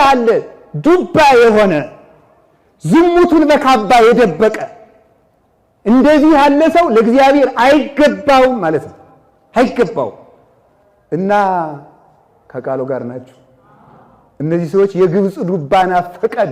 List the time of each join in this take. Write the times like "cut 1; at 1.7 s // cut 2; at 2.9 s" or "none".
none